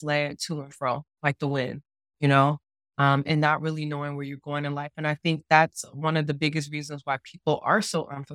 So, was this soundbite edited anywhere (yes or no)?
no